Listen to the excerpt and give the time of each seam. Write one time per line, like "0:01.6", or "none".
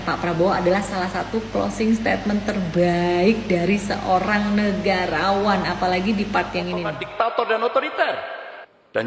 0:07.0